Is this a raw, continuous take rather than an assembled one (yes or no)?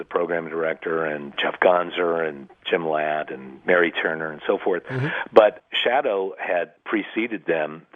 no